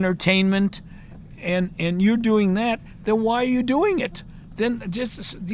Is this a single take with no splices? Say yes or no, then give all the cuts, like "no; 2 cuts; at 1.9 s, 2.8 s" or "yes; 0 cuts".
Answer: yes; 0 cuts